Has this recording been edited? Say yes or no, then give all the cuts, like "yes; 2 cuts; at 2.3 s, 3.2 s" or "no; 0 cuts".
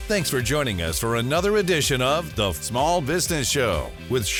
no; 0 cuts